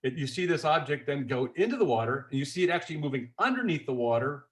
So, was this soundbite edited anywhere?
no; 0 cuts

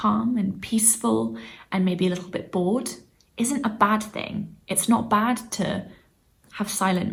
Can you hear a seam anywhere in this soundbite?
no; 0 cuts

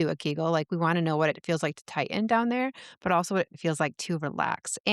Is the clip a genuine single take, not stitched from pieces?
no; 1 cut; at 3.6 s

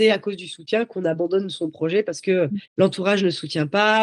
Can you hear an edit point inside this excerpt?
no; 0 cuts

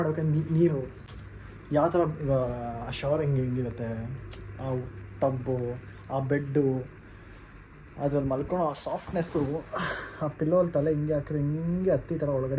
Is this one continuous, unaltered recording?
yes; 0 cuts

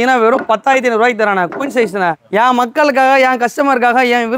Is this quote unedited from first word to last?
yes; 0 cuts

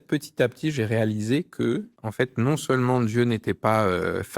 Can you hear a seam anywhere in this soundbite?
yes; 1 cut; at 2.0 s

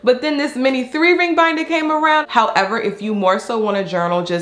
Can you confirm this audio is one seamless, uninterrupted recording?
no; 1 cut; at 2.3 s

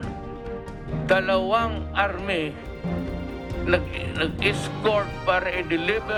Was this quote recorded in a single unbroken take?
yes; 0 cuts

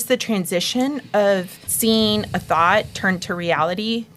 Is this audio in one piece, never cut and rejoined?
no; 1 cut; at 1.6 s

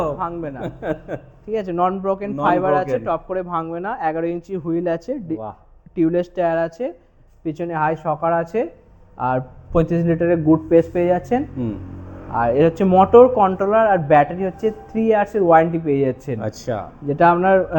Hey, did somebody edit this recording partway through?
no; 0 cuts

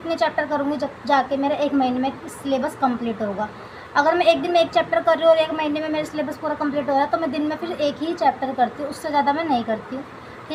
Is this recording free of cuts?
yes; 0 cuts

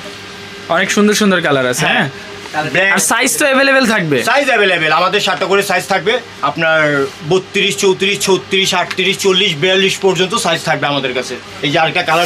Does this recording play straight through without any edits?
yes; 0 cuts

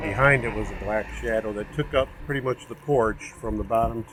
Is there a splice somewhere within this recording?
no; 0 cuts

